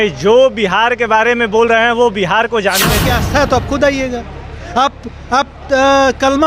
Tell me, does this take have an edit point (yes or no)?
yes